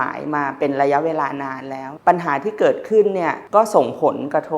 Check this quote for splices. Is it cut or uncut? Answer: cut